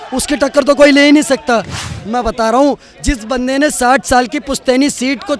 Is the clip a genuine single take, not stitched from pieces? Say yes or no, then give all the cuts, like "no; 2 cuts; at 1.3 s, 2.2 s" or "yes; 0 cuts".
no; 1 cut; at 1.8 s